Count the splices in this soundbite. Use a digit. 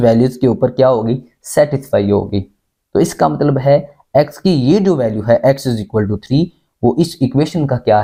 0